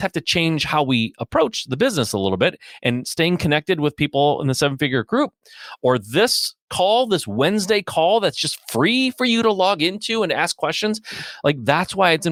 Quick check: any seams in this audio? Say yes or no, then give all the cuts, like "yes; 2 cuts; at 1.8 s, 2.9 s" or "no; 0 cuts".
no; 0 cuts